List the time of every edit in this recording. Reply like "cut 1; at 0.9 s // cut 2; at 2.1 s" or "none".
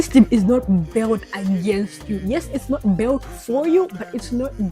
none